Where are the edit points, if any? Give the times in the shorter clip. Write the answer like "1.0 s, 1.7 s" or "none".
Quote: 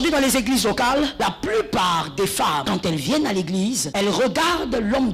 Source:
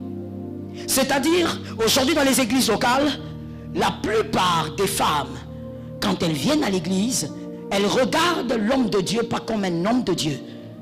1.1 s, 2.6 s, 3.8 s